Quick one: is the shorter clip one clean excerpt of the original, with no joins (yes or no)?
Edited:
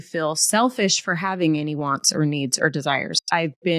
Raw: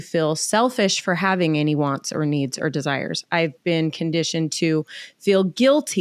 yes